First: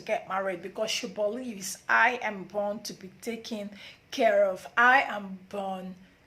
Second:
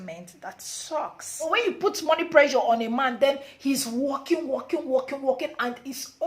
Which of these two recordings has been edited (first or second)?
second